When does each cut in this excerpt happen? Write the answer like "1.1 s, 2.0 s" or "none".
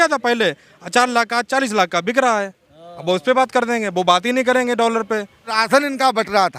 5.6 s